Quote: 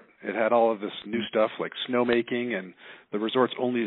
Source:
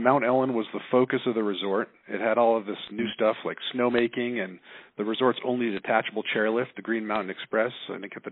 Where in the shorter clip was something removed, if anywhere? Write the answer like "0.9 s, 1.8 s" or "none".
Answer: none